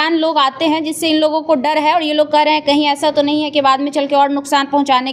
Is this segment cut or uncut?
uncut